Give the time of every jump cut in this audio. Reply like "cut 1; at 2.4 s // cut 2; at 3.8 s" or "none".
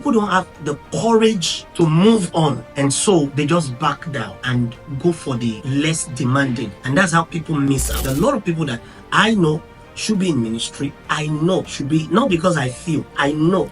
cut 1; at 1.6 s // cut 2; at 2.6 s // cut 3; at 3.3 s // cut 4; at 4.4 s // cut 5; at 5.6 s // cut 6; at 6.8 s // cut 7; at 7.9 s // cut 8; at 11.8 s